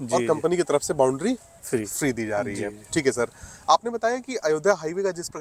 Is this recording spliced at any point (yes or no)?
no